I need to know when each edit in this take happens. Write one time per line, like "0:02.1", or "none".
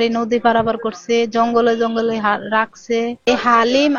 none